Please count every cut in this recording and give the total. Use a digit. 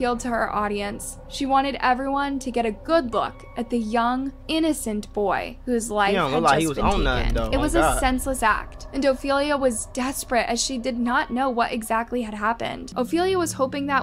1